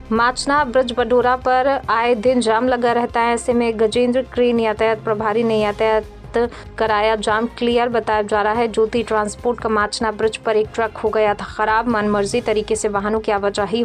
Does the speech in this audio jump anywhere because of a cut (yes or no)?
no